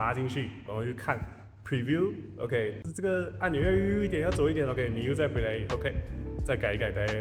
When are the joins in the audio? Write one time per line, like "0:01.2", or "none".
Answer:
none